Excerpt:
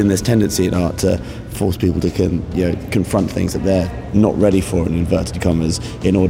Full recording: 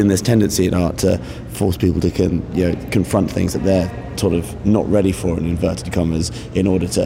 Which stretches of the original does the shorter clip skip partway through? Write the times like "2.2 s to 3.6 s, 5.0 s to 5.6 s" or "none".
4.0 s to 4.5 s